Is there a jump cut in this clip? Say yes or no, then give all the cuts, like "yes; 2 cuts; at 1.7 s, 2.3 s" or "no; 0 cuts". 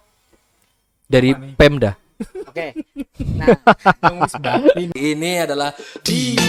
yes; 1 cut; at 4.9 s